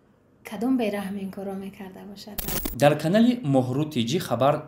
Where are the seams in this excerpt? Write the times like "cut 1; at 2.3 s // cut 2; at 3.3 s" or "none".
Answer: cut 1; at 2.6 s